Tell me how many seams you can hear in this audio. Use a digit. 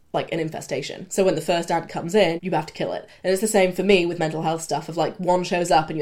2